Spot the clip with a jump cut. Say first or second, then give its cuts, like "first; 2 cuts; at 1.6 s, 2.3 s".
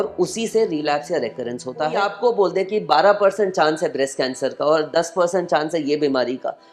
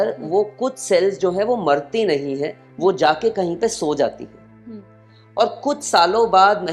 first; 1 cut; at 2.0 s